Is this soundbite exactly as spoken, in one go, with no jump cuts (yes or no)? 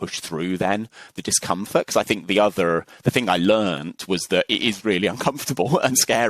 yes